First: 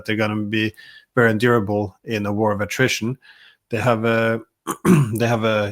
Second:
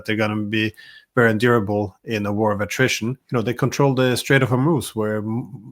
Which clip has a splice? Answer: second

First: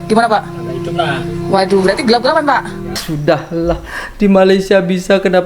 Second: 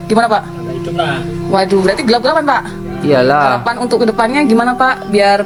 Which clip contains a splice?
first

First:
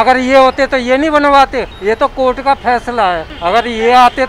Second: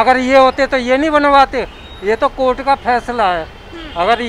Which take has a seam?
first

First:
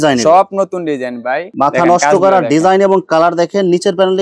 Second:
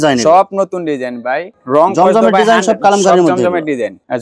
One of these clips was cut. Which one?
first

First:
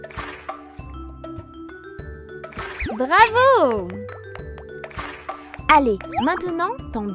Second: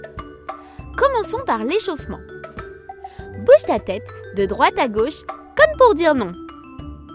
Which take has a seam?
second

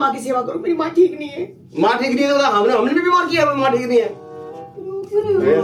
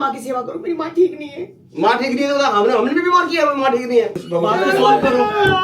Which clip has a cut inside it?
second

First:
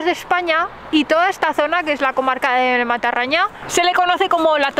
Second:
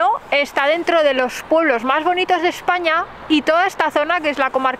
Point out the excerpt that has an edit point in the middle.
first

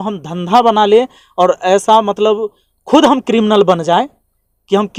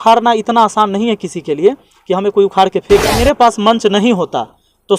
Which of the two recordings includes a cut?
second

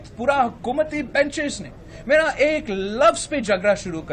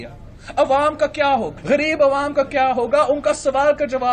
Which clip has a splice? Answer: second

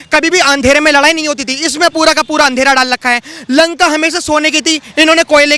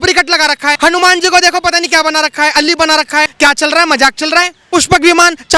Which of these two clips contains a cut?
second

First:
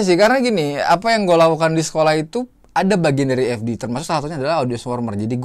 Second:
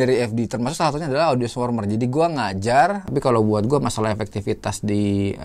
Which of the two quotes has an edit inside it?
second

